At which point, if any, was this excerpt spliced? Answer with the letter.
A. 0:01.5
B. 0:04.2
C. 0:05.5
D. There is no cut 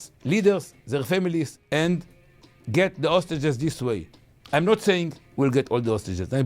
A